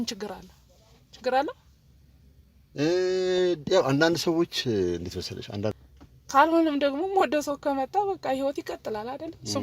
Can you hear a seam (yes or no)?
yes